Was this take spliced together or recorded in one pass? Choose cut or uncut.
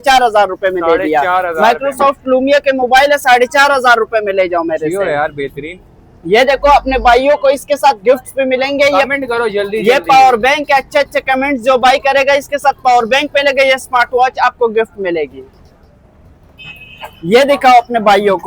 uncut